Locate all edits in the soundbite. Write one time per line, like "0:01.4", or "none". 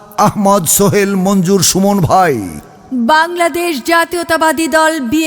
0:02.9